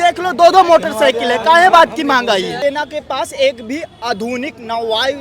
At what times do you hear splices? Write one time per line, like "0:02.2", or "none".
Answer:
0:02.6